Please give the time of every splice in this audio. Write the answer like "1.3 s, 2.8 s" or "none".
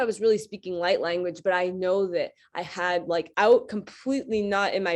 3.3 s